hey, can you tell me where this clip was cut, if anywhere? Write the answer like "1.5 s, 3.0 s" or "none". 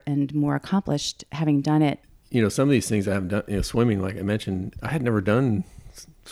2.1 s